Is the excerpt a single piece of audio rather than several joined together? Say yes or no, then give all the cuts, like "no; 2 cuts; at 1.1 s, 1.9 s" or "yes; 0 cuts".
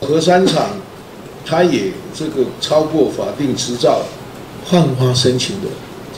yes; 0 cuts